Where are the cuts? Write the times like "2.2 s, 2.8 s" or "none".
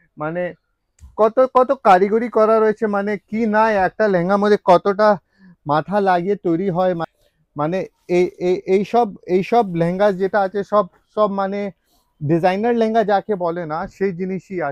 7.1 s